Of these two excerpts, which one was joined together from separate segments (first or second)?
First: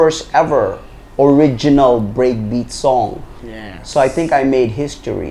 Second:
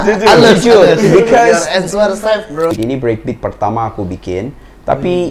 second